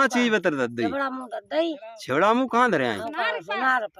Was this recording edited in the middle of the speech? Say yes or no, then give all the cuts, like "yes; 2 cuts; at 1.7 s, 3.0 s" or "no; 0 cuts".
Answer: no; 0 cuts